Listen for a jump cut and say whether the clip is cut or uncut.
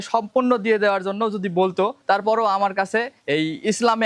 cut